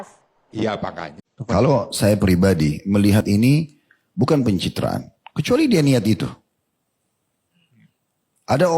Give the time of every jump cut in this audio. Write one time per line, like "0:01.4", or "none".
0:01.2